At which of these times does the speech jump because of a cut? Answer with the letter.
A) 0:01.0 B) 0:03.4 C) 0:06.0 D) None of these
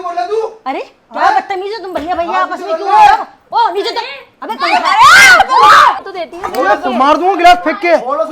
C